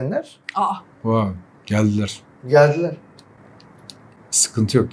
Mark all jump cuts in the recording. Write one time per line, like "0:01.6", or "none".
none